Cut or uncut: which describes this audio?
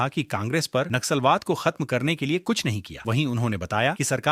uncut